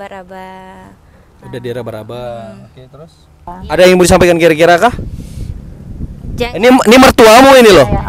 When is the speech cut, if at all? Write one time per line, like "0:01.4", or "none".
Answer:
0:03.5